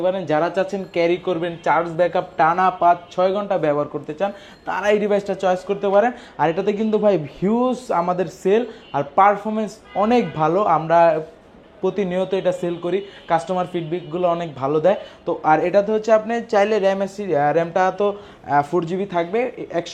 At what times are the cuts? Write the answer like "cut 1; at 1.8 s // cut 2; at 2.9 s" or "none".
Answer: none